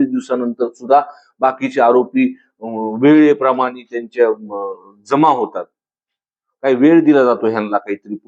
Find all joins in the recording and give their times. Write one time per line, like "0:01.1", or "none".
none